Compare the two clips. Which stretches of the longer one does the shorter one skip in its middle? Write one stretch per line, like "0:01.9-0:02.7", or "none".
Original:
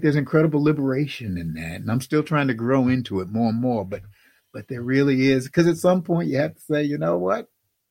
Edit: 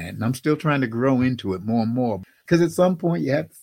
0:04.1-0:05.5